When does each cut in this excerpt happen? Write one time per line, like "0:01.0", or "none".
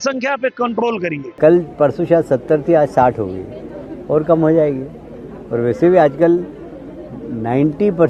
0:01.2